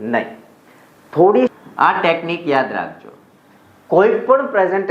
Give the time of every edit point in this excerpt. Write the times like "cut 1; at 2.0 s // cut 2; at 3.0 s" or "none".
cut 1; at 1.6 s